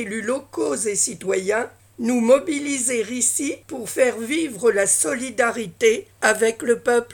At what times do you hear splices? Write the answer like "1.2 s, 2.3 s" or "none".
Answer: 1.8 s, 3.7 s, 6.1 s